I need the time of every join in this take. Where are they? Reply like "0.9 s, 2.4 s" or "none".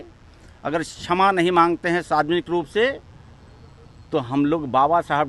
none